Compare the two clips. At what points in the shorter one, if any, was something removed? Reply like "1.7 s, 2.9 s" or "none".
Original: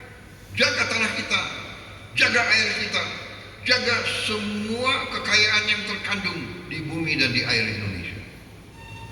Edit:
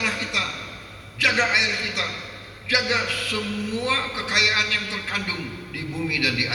none